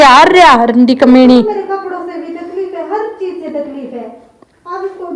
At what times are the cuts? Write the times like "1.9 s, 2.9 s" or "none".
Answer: none

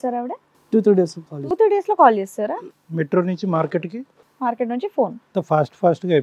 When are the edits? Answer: 5.2 s

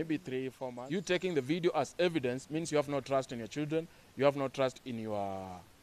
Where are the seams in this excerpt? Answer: 1.0 s

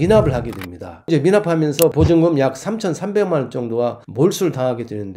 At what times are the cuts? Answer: 4.0 s

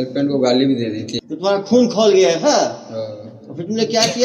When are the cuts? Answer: 1.1 s

